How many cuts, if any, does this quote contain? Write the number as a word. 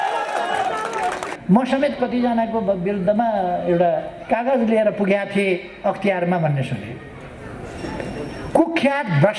one